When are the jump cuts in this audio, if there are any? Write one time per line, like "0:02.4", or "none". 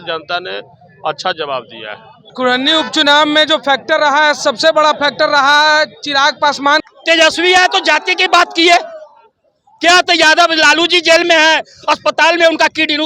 0:02.3
0:06.8